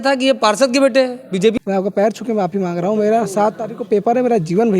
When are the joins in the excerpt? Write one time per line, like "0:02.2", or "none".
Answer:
0:01.6